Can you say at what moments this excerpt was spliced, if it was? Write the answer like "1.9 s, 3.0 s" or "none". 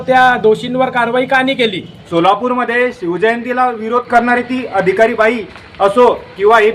1.9 s